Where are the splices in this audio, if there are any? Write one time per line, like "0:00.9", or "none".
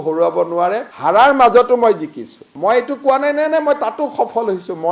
0:02.5